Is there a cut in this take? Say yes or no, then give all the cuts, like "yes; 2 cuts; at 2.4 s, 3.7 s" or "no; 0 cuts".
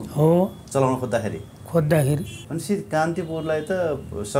yes; 1 cut; at 2.4 s